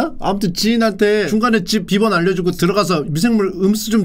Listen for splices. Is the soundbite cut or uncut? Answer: cut